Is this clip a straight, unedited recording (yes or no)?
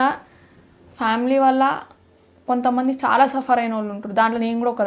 yes